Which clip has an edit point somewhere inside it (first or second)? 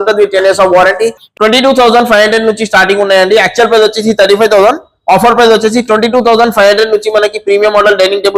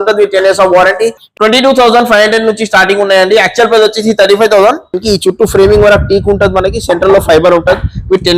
second